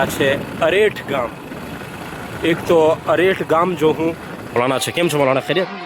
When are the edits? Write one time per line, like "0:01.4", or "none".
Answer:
0:04.6